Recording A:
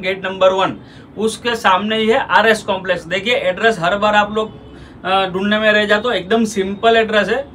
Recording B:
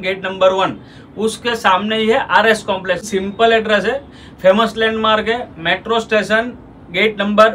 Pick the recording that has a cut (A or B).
B